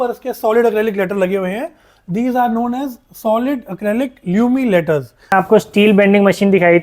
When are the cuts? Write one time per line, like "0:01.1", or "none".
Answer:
0:05.3